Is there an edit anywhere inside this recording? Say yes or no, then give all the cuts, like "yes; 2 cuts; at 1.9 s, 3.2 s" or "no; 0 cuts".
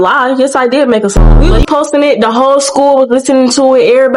yes; 1 cut; at 1.2 s